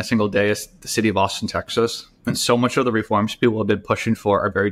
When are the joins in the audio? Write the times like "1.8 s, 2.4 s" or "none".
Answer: none